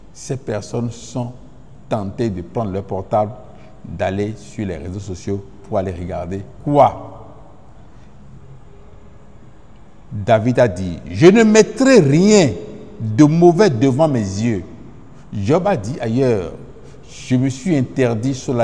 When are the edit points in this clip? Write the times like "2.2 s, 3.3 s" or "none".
none